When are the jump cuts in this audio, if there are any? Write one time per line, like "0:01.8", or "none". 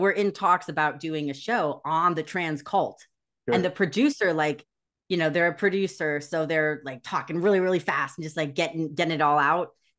none